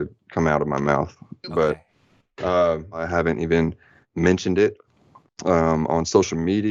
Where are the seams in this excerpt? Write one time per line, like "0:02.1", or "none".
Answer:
0:03.1